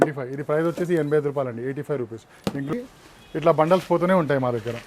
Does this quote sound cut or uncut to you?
cut